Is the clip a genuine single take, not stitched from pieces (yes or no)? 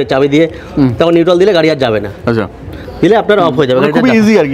yes